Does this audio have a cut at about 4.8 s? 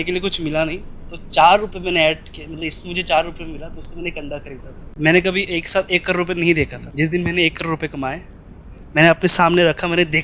yes; 2 cuts; at 4.8 s, 6.8 s

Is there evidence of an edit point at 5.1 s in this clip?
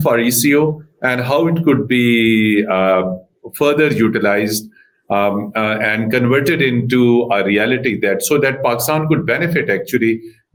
no; 0 cuts

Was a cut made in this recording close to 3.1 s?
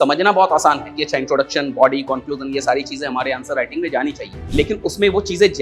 no; 1 cut; at 4.3 s

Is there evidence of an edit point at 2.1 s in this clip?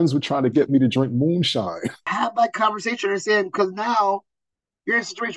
yes; 1 cut; at 2.1 s

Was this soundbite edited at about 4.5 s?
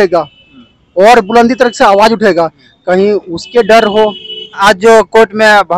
yes; 1 cut; at 4.5 s

